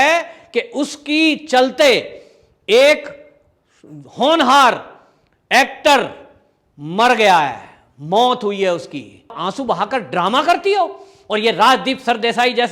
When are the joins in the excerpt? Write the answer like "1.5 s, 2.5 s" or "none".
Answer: 9.3 s